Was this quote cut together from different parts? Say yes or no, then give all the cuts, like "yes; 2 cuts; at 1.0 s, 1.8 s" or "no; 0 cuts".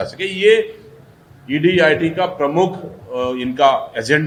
no; 0 cuts